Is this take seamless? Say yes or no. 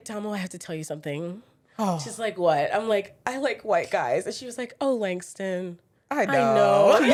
yes